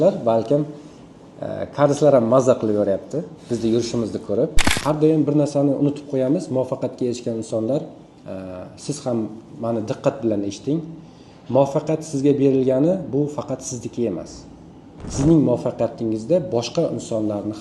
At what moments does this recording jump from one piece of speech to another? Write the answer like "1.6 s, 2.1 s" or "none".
4.7 s